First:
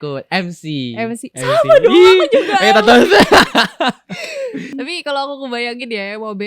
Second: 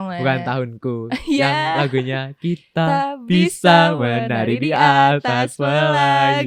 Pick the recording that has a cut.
first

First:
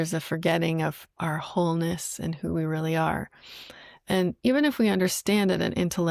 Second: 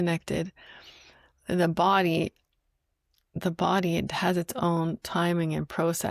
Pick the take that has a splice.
first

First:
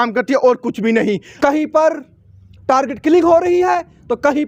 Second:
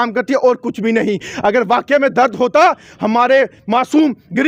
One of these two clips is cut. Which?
first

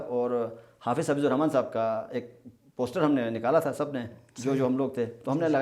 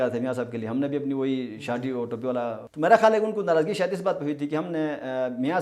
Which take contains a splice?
second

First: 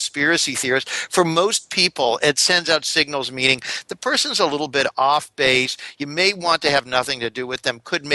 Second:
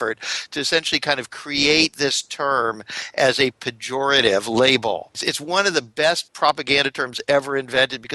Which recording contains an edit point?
second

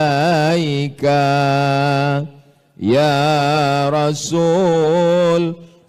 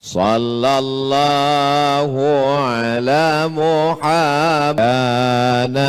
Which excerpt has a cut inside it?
second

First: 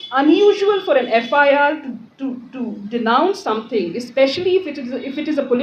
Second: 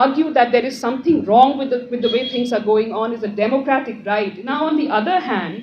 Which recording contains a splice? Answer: second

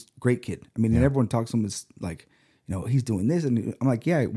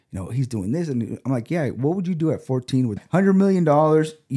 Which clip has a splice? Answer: second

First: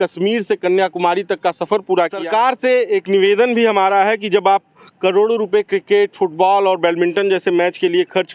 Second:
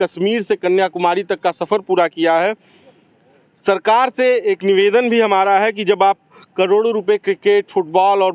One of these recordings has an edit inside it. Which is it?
first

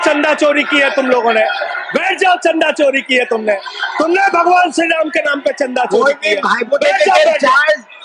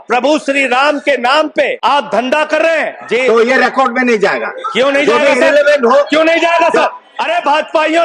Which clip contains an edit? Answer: second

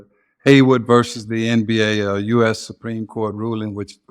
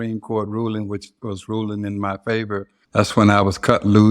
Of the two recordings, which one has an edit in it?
second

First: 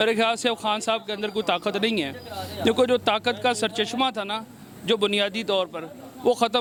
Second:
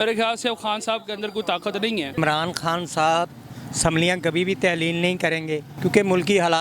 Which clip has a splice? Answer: second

